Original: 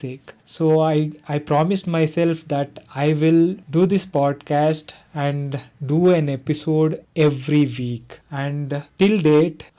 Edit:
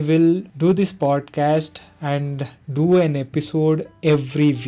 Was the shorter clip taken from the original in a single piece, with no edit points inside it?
yes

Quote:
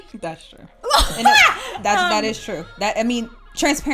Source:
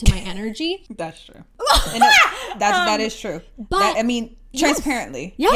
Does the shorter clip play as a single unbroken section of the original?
no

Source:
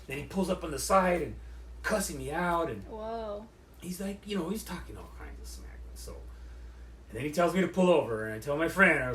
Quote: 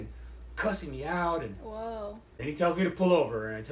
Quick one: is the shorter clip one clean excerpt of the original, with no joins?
no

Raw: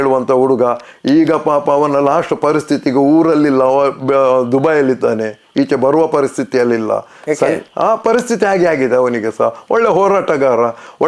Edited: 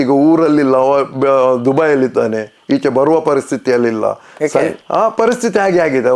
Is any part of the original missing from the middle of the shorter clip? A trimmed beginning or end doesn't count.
no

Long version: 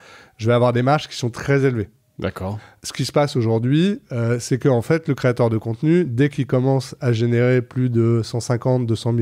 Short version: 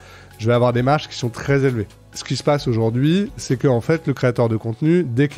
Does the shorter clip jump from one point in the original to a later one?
yes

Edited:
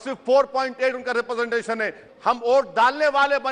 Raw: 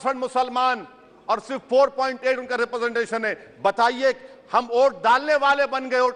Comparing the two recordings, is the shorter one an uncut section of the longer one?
no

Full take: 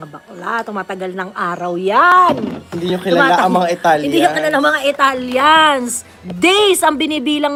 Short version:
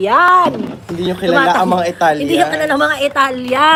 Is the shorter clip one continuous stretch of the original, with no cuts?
yes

